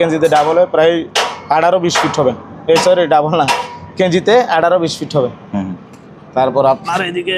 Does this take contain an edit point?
no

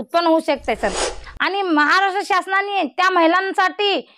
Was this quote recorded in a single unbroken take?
no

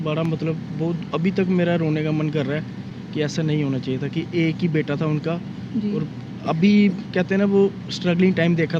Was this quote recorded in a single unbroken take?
yes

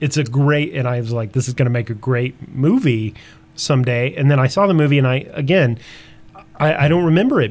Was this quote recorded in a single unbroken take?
yes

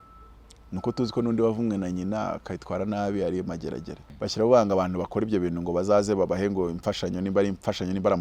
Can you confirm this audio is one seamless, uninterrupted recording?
no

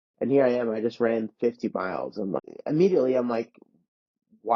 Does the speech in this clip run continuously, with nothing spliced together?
no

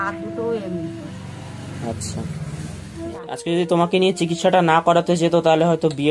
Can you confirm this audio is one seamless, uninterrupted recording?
no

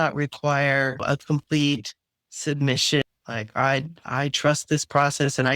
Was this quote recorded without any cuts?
no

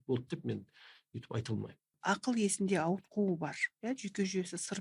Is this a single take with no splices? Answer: no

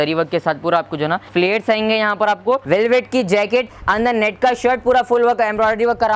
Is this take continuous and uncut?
no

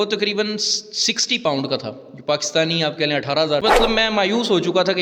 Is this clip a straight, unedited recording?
no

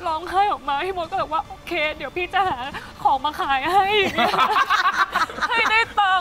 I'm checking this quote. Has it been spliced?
no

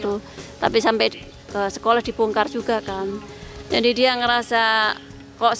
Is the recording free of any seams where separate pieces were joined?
yes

